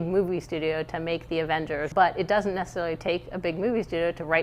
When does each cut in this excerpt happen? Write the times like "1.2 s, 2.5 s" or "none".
1.9 s